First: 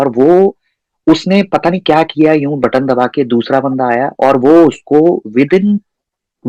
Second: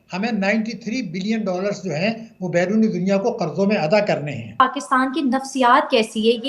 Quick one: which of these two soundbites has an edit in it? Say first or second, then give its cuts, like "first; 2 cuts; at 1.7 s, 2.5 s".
second; 1 cut; at 4.6 s